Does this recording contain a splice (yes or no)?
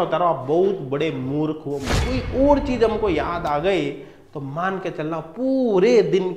yes